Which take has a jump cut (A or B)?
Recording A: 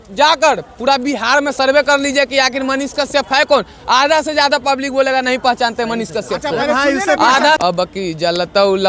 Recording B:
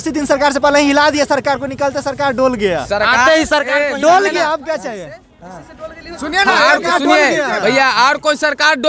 A